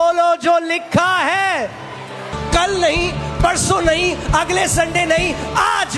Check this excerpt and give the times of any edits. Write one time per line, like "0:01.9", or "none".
0:02.4